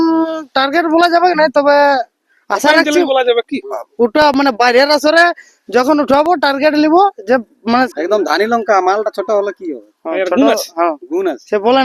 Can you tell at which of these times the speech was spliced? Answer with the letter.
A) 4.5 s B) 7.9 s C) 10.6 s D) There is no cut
B